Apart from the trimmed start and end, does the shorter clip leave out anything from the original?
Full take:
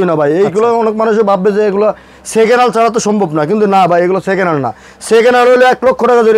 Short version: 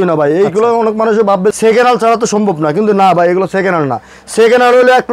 yes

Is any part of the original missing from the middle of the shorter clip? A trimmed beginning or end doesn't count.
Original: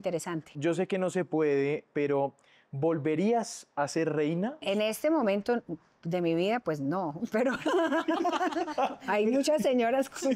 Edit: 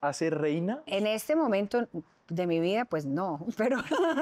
no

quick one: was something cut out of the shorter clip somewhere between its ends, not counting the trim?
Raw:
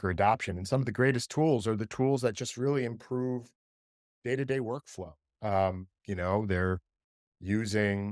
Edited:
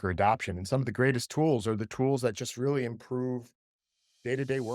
no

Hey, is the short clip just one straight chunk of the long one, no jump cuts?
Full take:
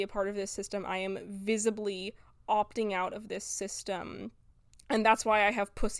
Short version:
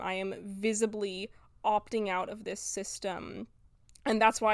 yes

